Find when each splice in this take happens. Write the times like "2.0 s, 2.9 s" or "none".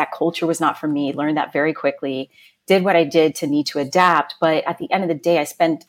none

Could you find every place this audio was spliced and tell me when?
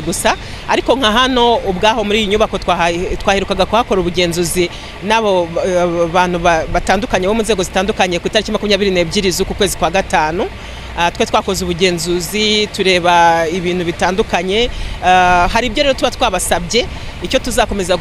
none

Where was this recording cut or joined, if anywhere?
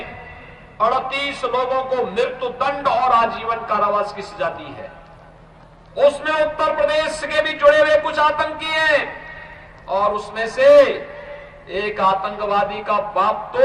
none

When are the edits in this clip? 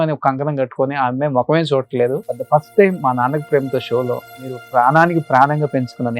2.3 s, 4.6 s

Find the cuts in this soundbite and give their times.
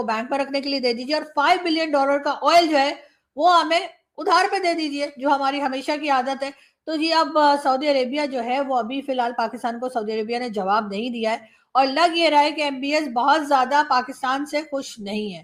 none

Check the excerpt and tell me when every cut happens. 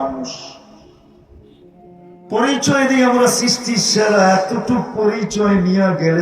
0.8 s, 2.3 s

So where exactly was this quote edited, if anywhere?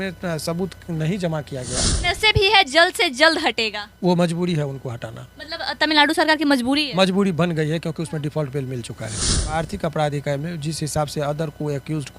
1.9 s, 9.5 s

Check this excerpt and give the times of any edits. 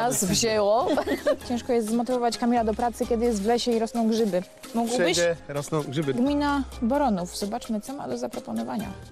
1.4 s, 6.1 s

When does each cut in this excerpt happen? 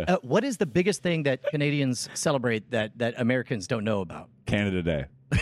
none

